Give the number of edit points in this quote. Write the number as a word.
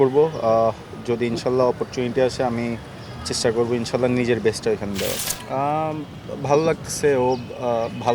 one